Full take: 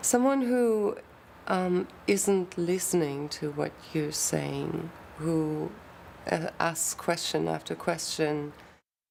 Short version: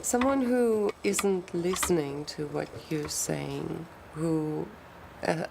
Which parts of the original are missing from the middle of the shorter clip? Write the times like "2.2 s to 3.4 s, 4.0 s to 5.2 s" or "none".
1.0 s to 2.0 s